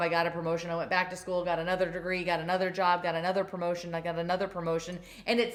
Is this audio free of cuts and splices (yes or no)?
yes